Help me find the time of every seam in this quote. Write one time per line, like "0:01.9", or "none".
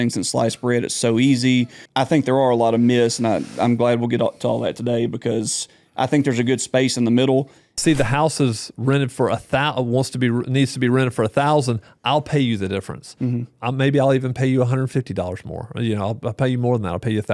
0:01.8
0:07.8